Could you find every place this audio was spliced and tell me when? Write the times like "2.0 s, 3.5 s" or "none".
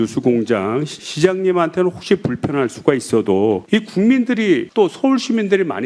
0.9 s